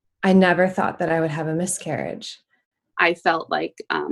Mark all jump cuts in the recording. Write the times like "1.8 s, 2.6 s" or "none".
2.9 s